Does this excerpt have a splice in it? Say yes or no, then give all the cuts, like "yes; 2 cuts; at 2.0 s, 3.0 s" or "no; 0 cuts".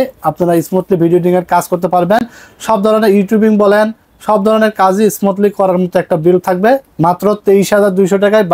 no; 0 cuts